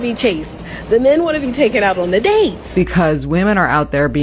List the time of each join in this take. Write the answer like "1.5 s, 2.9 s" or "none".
2.6 s

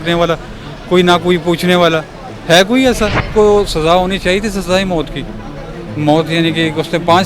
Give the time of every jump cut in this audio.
3.3 s

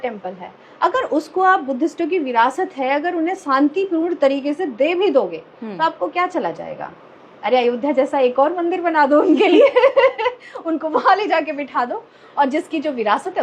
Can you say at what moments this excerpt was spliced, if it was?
none

